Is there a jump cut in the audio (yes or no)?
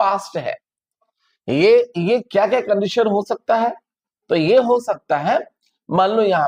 no